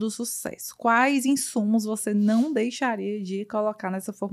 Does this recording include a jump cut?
no; 0 cuts

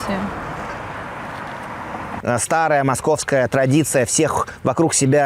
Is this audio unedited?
no; 1 cut; at 2.1 s

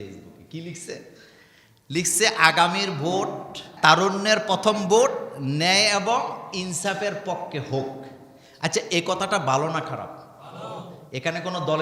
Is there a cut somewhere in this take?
yes; 1 cut; at 3.7 s

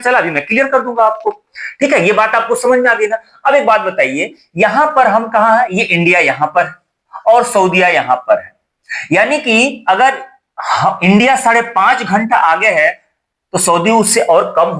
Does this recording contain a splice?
no; 0 cuts

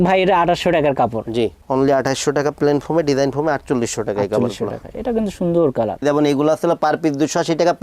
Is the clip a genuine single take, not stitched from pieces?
no; 2 cuts; at 1.6 s, 6.0 s

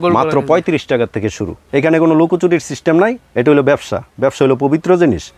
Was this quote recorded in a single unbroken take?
no; 1 cut; at 1.5 s

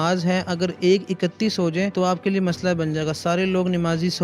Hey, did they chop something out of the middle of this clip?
yes; 1 cut; at 1.9 s

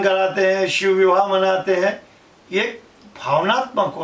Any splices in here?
no; 0 cuts

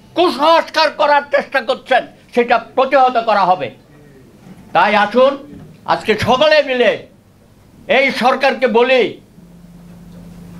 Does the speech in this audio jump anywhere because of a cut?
no; 0 cuts

